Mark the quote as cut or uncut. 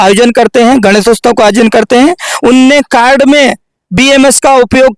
uncut